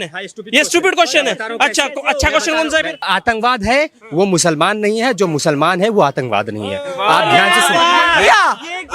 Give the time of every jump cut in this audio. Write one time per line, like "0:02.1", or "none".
0:03.1